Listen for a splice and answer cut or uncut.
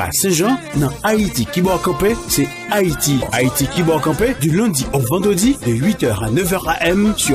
cut